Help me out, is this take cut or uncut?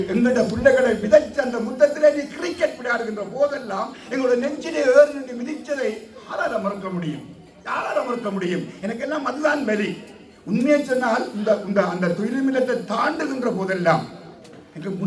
uncut